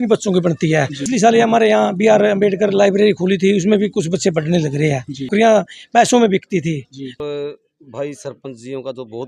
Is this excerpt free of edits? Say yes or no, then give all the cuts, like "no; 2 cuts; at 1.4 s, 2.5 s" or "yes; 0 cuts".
no; 3 cuts; at 1.1 s, 5.3 s, 7.1 s